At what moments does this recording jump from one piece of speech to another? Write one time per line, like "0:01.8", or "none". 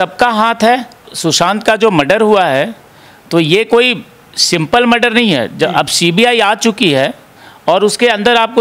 0:01.1